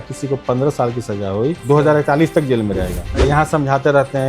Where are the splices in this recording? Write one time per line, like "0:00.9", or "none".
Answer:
0:01.6
0:03.1